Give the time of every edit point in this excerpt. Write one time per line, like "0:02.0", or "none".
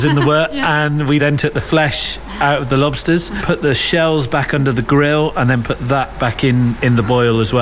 0:01.0
0:03.3